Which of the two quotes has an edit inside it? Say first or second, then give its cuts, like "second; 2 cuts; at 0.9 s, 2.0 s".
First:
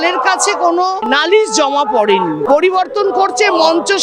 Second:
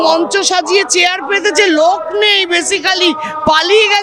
first; 2 cuts; at 1.0 s, 2.4 s